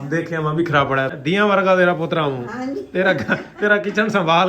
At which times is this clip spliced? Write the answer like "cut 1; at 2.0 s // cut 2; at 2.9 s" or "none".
cut 1; at 1.1 s